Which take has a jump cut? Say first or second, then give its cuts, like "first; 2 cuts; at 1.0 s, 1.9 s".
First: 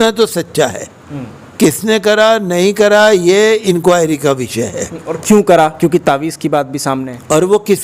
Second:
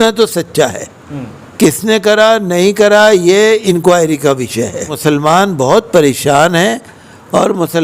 second; 1 cut; at 4.9 s